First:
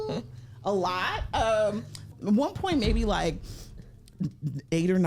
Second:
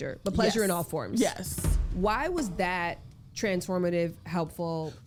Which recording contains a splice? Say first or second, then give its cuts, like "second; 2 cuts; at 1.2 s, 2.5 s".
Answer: first; 1 cut; at 2.0 s